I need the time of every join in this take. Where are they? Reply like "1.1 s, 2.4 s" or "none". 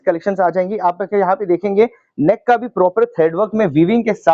none